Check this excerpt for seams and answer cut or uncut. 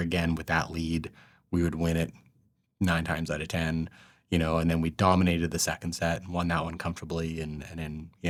uncut